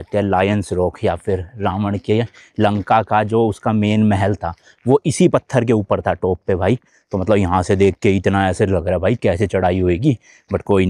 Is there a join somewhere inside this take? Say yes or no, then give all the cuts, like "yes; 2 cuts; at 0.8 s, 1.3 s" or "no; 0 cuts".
no; 0 cuts